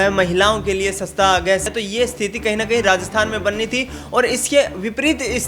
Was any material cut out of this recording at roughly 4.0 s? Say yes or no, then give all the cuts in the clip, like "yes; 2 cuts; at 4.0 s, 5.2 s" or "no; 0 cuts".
no; 1 cut; at 1.7 s